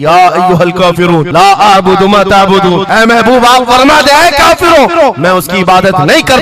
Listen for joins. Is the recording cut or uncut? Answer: uncut